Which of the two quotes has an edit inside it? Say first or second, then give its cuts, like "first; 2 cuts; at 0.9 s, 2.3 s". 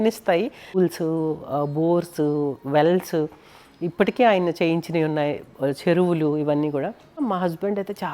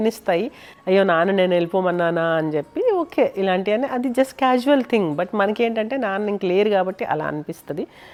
first; 2 cuts; at 0.8 s, 7.2 s